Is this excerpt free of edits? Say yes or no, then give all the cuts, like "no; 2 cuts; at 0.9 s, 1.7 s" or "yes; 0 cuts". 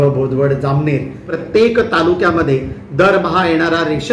no; 1 cut; at 1.3 s